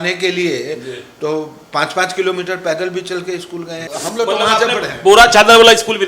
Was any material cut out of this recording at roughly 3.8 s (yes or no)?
yes